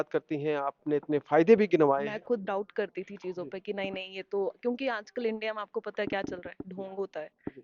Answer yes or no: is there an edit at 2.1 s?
yes